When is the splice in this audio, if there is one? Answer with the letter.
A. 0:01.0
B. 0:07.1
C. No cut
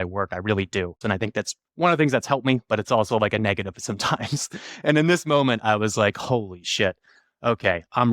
A